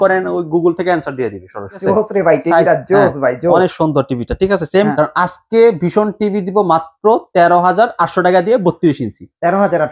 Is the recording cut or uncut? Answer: cut